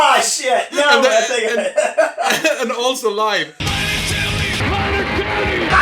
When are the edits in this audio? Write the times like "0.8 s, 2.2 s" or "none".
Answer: 3.6 s